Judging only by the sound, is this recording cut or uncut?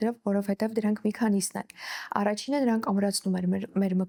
uncut